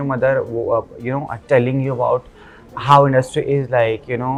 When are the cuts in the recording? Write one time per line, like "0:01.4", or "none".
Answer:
none